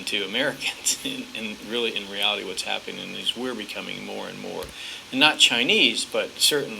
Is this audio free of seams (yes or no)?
no